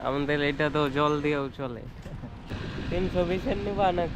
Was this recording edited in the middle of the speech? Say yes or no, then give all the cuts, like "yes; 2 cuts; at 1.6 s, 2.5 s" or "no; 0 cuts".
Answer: yes; 1 cut; at 2.5 s